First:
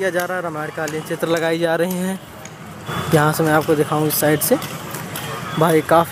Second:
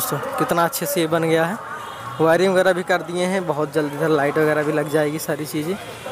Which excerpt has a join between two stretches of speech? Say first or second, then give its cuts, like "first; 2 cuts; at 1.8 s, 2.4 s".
first; 1 cut; at 2.9 s